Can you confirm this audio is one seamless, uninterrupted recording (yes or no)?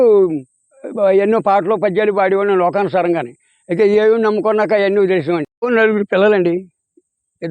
no